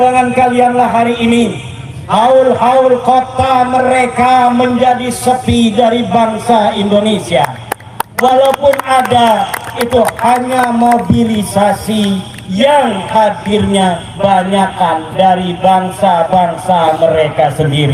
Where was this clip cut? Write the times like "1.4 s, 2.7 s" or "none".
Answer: none